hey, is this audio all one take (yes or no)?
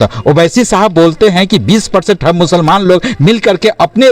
yes